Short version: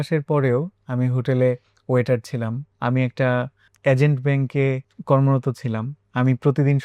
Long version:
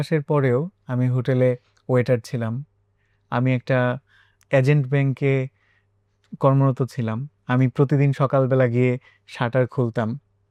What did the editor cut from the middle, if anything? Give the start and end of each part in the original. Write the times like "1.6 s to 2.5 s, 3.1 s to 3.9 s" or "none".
2.7 s to 3.2 s, 4.1 s to 4.3 s, 5.6 s to 6.2 s